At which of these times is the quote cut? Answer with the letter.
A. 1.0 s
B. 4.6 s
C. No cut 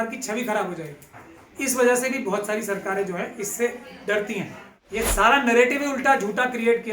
B